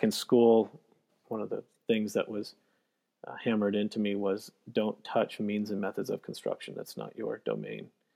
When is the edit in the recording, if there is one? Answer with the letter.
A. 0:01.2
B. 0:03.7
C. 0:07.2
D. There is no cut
A